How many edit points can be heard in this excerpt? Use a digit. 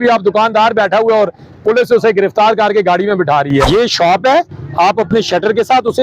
1